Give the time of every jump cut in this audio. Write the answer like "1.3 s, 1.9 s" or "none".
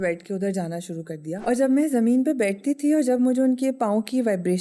1.4 s